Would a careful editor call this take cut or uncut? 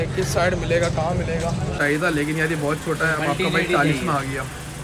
cut